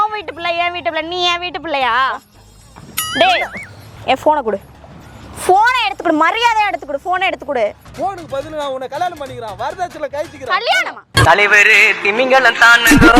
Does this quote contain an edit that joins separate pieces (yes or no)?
yes